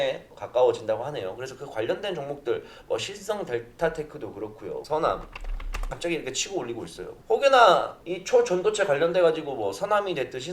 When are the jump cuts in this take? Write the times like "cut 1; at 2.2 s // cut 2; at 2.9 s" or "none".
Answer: cut 1; at 4.8 s